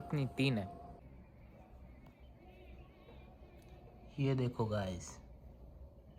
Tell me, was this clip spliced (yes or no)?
no